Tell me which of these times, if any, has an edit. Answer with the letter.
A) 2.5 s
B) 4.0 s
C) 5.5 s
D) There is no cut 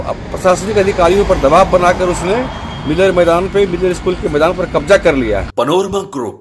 C